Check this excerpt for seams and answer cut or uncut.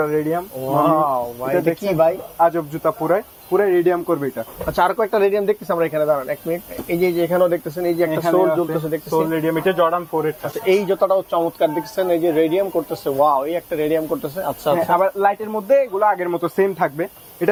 uncut